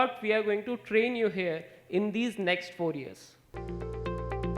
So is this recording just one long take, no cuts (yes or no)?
no